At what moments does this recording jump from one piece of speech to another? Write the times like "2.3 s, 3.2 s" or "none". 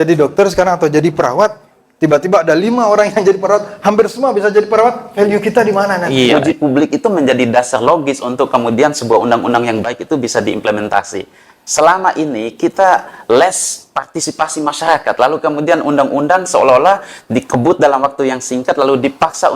6.4 s

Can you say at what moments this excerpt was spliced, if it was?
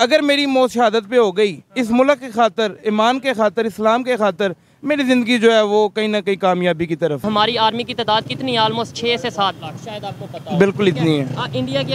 7.2 s

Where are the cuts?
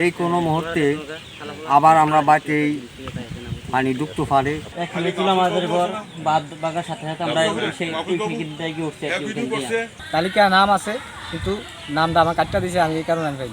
4.7 s, 10.0 s

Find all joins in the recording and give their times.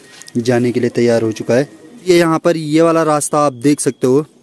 2.1 s

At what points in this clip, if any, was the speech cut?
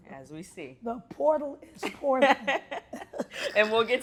none

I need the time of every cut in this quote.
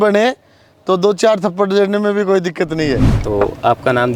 3.1 s

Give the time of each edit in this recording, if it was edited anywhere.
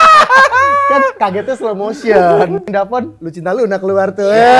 2.6 s

